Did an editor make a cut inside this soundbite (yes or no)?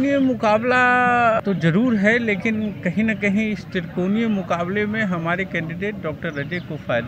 yes